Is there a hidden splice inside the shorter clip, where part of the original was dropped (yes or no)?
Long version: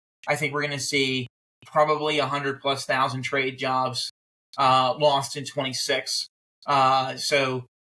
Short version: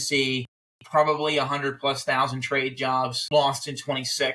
yes